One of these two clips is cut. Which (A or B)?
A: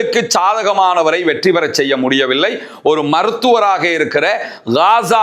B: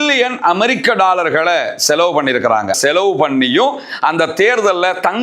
B